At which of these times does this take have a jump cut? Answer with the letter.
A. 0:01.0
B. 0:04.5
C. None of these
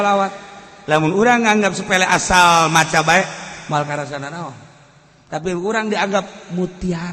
C